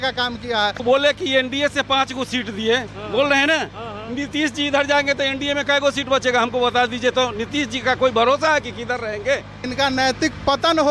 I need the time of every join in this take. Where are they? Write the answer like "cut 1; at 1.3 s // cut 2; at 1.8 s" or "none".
cut 1; at 0.8 s // cut 2; at 9.7 s